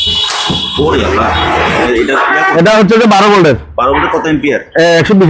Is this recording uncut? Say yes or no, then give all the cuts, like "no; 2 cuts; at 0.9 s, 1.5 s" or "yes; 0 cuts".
no; 1 cut; at 1.9 s